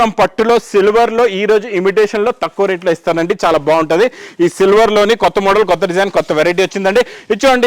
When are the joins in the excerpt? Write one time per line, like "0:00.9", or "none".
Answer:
none